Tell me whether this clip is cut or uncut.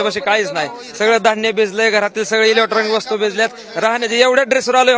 uncut